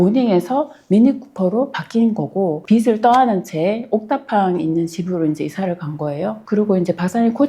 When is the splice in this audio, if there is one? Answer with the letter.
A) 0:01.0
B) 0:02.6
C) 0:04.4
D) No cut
B